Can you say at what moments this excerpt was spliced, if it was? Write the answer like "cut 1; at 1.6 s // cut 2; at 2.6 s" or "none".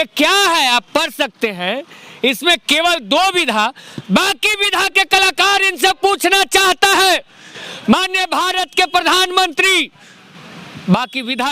none

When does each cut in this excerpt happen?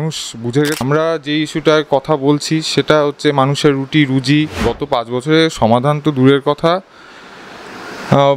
cut 1; at 0.8 s // cut 2; at 4.7 s

